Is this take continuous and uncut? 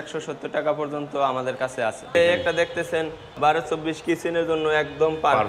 no; 2 cuts; at 2.1 s, 3.3 s

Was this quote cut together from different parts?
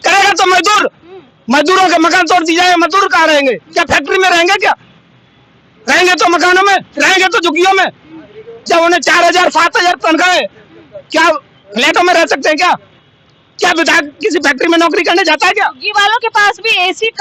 no; 0 cuts

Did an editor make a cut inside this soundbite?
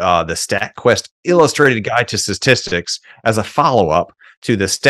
no; 0 cuts

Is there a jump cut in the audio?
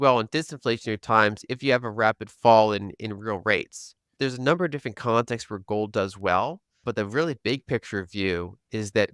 yes; 2 cuts; at 4.1 s, 6.8 s

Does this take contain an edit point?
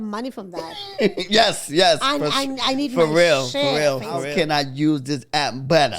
yes; 1 cut; at 4.3 s

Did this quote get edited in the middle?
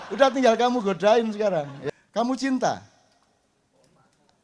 yes; 1 cut; at 1.8 s

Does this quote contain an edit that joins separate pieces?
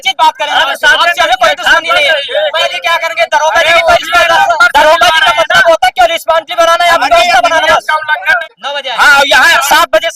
yes; 2 cuts; at 2.7 s, 8.3 s

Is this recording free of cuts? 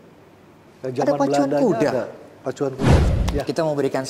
no; 1 cut; at 3.1 s

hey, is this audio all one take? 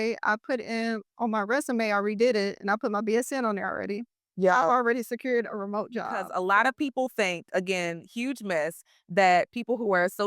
no; 1 cut; at 6.2 s

